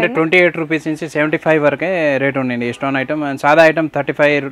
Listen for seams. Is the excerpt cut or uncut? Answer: uncut